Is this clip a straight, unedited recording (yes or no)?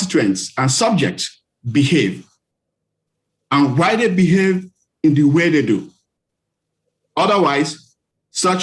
yes